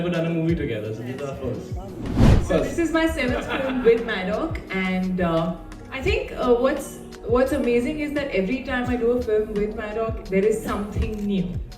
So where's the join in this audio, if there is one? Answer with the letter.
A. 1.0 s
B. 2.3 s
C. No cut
B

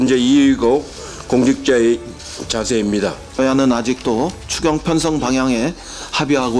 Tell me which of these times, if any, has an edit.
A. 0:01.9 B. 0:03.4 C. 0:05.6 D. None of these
B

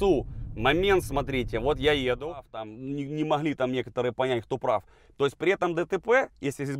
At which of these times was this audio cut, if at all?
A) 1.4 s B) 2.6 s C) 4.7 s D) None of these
B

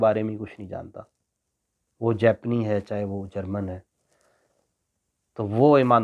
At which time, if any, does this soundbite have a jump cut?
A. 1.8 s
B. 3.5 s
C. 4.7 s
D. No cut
D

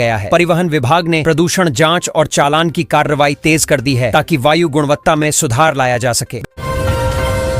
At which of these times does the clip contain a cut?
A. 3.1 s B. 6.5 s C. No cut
B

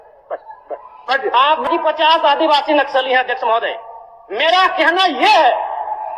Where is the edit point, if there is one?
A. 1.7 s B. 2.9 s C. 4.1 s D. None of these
A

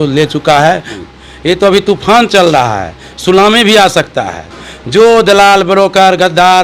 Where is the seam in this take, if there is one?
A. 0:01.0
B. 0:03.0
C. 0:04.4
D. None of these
A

